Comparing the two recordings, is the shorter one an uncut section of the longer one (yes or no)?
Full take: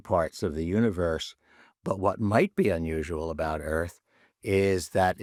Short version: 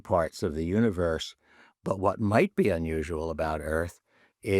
yes